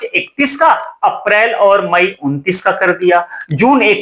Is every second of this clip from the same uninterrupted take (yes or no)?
yes